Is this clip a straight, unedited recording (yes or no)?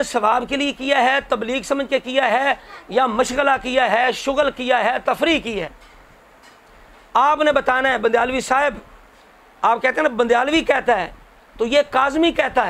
yes